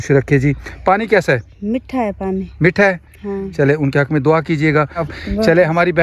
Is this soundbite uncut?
no; 1 cut; at 5.1 s

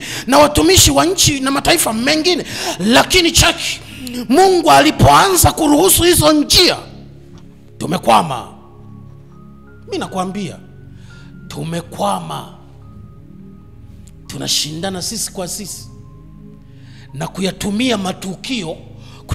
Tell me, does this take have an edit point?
no; 0 cuts

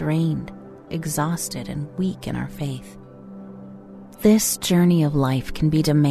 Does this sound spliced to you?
yes; 2 cuts; at 2.8 s, 4.2 s

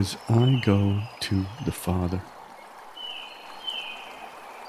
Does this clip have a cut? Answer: no; 0 cuts

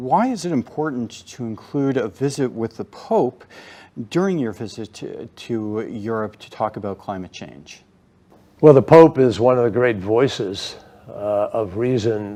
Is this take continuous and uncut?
yes; 0 cuts

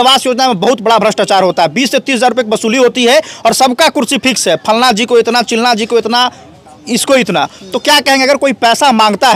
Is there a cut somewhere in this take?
no; 0 cuts

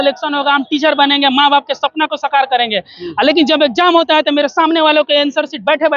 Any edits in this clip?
no; 0 cuts

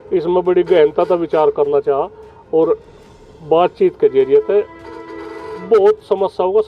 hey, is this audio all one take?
yes; 0 cuts

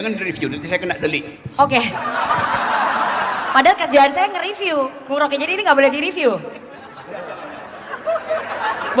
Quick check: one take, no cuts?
yes; 0 cuts

